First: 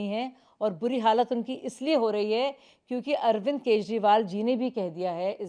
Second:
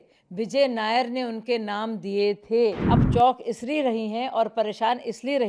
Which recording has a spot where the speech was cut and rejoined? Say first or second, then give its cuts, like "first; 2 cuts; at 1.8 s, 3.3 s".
second; 1 cut; at 2.8 s